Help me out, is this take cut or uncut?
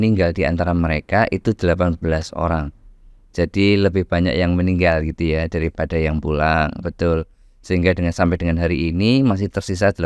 uncut